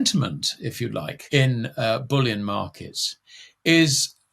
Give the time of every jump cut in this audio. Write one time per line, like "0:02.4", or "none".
0:01.2